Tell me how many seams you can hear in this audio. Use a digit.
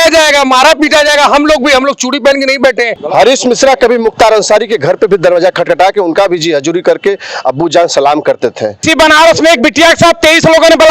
2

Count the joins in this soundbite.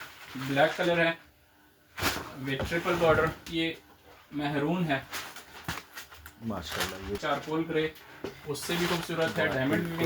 2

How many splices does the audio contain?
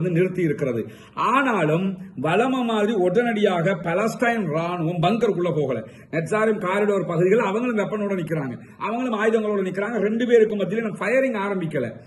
0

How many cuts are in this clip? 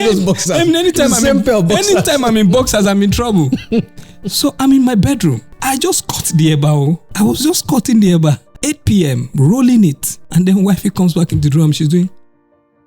4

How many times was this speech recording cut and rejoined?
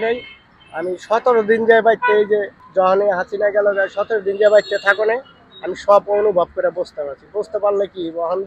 0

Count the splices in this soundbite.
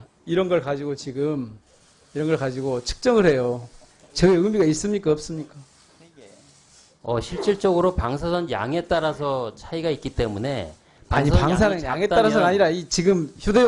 0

